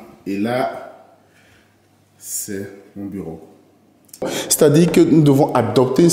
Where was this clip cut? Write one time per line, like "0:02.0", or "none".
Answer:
0:04.4

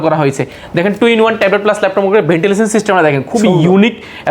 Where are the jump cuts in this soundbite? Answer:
none

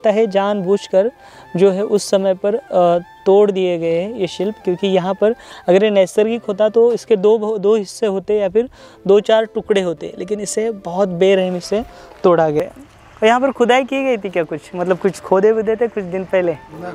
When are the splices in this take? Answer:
0:12.6

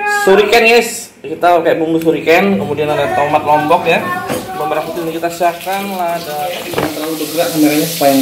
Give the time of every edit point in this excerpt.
0:06.5

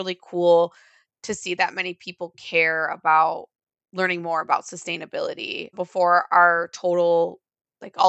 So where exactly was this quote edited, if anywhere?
0:05.8

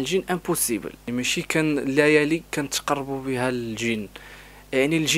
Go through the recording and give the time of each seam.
0:01.0

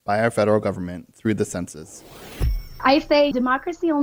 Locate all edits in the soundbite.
0:02.3

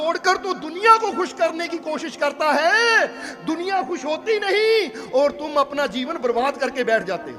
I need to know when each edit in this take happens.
none

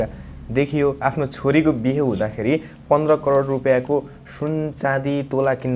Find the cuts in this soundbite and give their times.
none

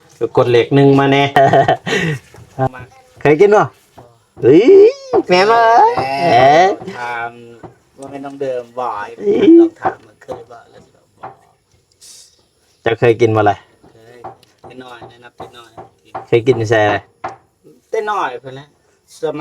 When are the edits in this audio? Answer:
0:01.4

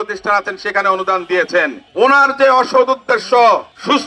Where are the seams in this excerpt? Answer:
0:01.8

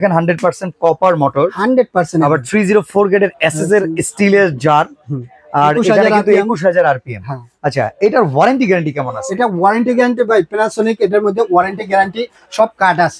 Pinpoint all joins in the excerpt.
none

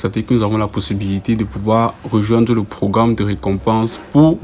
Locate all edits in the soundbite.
none

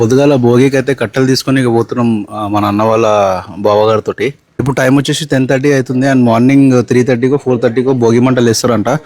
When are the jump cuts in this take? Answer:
0:04.5

